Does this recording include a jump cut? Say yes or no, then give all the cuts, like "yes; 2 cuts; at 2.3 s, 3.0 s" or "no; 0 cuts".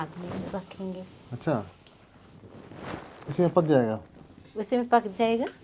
no; 0 cuts